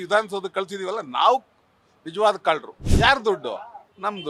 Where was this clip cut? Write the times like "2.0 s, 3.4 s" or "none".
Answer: 2.8 s